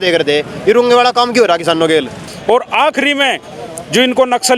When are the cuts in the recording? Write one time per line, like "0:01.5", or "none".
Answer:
0:02.3